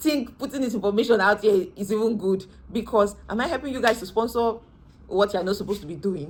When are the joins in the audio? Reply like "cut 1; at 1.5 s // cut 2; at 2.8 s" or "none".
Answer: none